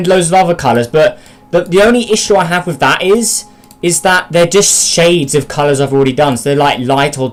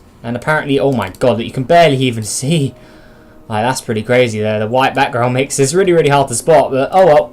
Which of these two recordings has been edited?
second; 1 cut; at 6.1 s

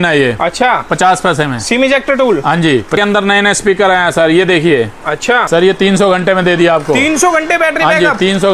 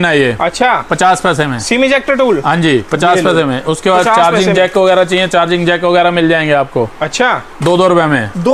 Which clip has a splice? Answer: first; 2 cuts; at 3.0 s, 5.4 s

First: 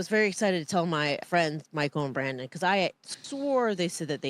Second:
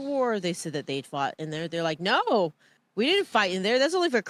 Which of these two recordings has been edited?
first; 1 cut; at 1.2 s

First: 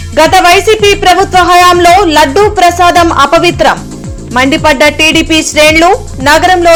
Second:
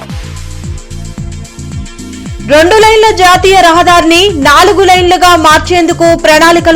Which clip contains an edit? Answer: second; 1 cut; at 1.1 s

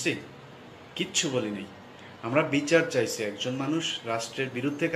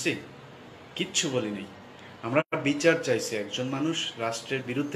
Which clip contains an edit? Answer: first; 1 cut; at 2.4 s

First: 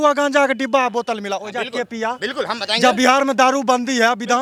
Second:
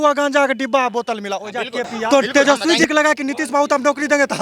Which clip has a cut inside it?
second; 1 cut; at 2.1 s

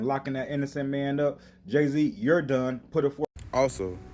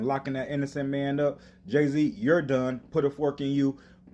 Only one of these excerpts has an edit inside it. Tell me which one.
first; 1 cut; at 3.2 s

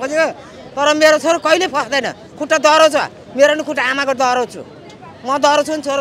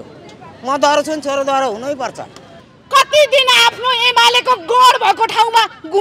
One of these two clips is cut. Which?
second; 1 cut; at 2.5 s

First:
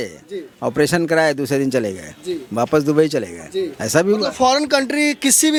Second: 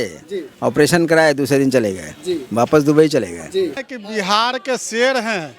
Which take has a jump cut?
second; 1 cut; at 3.9 s

